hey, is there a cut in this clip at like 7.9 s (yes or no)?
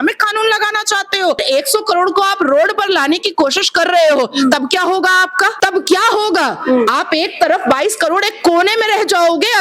no